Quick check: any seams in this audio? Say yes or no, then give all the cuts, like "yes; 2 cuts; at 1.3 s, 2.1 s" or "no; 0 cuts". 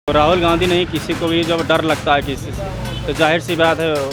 no; 0 cuts